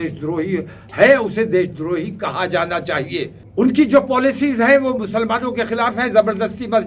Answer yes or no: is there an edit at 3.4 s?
yes